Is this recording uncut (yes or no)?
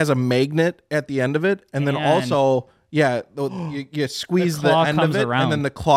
yes